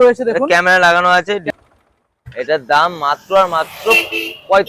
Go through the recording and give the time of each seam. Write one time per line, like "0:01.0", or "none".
0:01.4